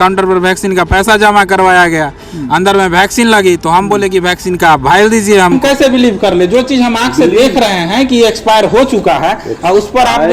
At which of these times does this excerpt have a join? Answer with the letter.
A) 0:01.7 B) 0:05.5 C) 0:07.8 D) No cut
B